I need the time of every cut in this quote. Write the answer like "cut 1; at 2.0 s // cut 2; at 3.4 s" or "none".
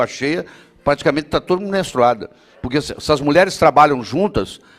none